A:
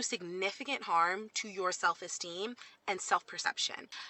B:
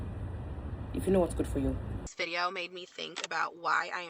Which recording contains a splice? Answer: B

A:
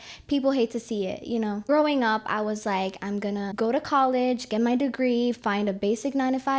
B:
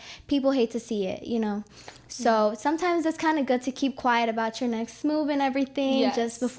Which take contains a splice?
A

